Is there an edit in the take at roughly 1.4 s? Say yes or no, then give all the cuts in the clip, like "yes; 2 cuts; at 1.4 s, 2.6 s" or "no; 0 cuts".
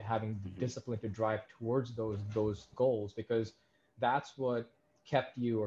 no; 1 cut; at 2.7 s